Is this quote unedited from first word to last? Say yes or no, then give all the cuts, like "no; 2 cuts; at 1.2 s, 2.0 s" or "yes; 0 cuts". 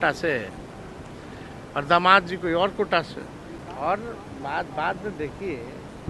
yes; 0 cuts